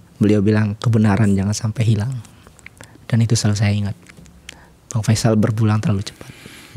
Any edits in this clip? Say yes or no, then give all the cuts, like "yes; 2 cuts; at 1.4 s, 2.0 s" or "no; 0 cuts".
no; 0 cuts